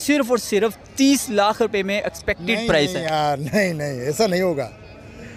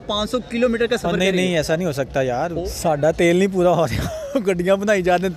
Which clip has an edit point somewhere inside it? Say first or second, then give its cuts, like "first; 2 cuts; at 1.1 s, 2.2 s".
second; 1 cut; at 2.6 s